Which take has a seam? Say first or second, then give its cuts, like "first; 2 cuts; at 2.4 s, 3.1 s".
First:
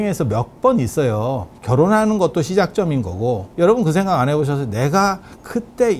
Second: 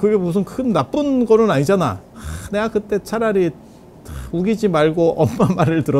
first; 2 cuts; at 1.5 s, 3.5 s